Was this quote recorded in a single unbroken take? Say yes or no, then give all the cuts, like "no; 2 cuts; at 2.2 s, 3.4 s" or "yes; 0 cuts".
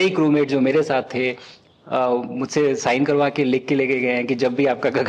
yes; 0 cuts